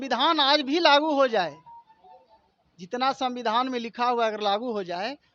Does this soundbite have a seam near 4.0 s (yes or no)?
no